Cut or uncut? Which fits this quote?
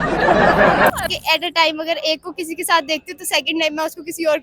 cut